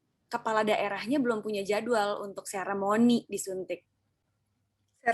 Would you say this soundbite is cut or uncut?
uncut